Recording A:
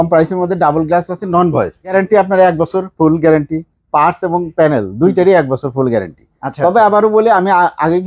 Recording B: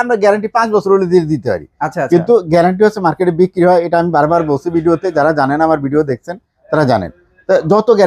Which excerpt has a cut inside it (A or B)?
A